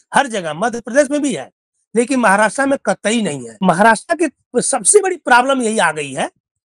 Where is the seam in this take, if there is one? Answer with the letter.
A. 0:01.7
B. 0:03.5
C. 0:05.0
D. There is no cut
B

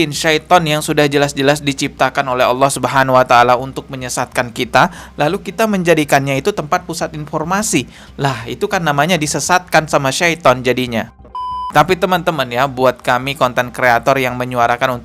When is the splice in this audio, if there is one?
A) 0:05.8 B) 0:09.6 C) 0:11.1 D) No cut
C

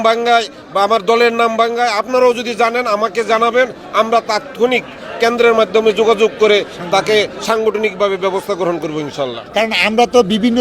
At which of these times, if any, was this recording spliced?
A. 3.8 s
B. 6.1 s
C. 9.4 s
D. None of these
C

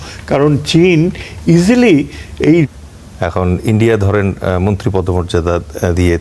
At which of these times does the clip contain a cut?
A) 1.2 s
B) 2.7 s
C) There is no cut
B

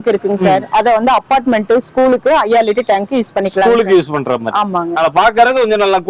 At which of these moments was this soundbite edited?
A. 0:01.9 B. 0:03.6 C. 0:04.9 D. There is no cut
D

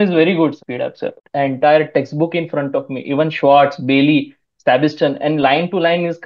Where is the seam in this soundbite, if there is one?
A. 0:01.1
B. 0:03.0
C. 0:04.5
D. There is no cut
A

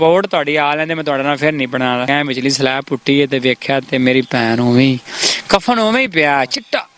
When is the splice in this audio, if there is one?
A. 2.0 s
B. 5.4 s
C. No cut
A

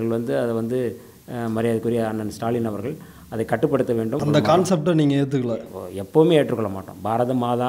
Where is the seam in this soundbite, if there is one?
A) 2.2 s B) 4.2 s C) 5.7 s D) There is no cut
B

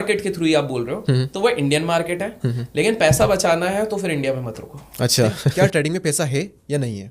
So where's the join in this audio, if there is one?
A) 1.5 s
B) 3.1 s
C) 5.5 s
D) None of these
C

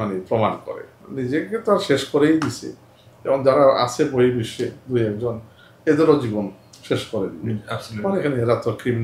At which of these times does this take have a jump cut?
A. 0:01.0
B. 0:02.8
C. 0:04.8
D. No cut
A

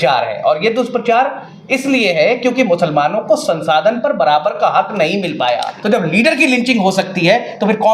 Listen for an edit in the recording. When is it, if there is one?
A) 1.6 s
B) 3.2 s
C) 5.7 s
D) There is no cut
C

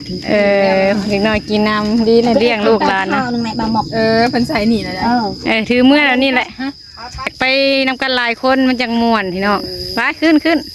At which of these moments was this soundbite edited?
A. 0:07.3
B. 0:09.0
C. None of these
A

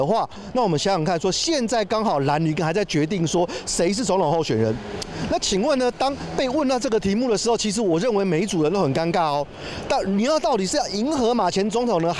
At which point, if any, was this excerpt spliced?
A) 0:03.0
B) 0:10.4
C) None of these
C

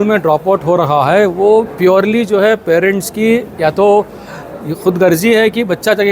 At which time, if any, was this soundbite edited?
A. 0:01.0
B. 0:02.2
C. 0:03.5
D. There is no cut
D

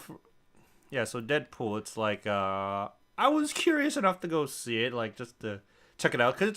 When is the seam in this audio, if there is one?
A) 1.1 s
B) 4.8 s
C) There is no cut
A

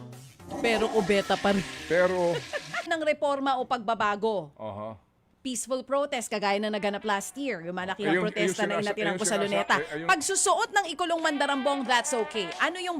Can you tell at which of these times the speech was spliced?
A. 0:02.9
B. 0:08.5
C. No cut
A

